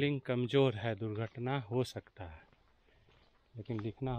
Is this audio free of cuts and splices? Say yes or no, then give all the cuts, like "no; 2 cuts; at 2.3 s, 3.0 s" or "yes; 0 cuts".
yes; 0 cuts